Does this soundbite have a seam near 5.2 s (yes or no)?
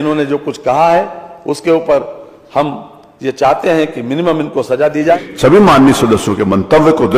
yes